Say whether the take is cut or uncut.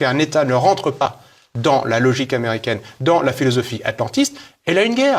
cut